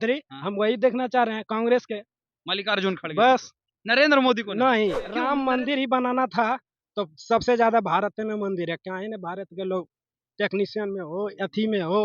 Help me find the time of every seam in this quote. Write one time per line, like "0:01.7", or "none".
0:05.1